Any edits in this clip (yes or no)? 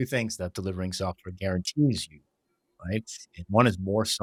no